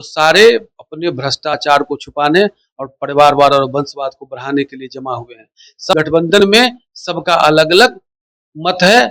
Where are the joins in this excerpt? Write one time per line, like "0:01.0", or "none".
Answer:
0:05.9